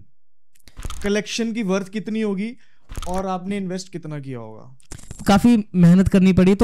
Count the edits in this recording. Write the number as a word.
one